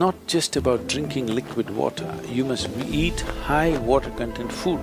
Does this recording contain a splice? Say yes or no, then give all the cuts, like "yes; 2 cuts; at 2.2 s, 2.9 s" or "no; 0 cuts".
no; 0 cuts